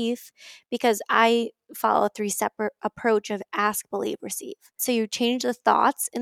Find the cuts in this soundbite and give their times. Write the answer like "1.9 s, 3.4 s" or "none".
4.8 s